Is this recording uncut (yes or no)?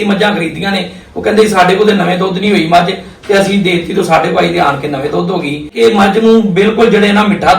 no